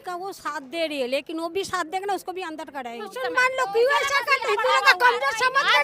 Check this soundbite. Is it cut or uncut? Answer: cut